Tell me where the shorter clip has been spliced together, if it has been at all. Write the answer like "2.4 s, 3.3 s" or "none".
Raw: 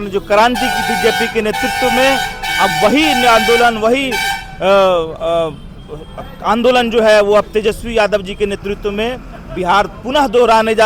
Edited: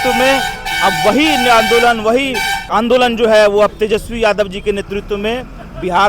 2.5 s